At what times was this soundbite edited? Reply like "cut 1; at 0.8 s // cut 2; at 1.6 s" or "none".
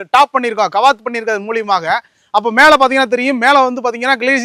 none